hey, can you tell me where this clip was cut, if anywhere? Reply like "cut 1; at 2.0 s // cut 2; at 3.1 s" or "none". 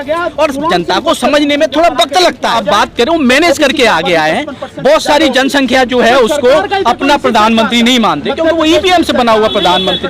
cut 1; at 2.6 s